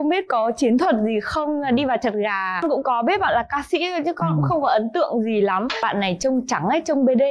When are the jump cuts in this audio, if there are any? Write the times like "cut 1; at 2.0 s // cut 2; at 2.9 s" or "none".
cut 1; at 2.6 s // cut 2; at 5.8 s